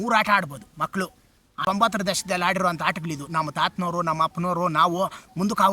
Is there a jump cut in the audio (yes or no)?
yes